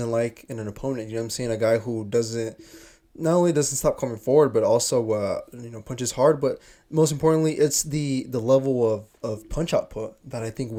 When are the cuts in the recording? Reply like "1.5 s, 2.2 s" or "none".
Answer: none